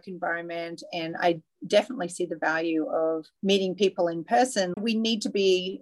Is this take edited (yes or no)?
yes